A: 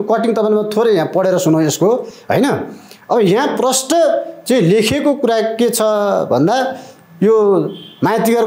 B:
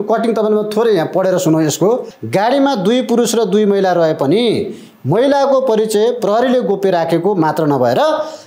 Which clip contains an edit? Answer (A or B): B